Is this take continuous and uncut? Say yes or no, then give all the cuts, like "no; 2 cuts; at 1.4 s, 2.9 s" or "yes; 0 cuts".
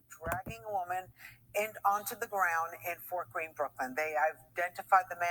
yes; 0 cuts